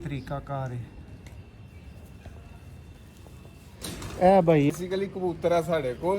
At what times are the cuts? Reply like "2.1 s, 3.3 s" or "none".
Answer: 4.7 s